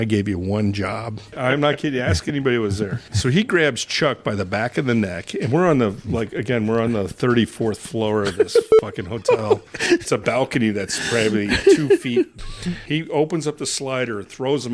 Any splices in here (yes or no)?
yes